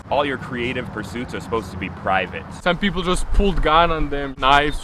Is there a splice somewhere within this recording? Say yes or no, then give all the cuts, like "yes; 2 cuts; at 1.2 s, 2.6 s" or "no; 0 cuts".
yes; 1 cut; at 2.6 s